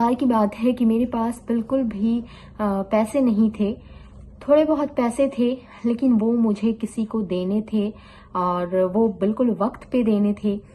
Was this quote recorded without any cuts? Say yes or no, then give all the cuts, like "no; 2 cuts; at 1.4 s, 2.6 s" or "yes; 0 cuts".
yes; 0 cuts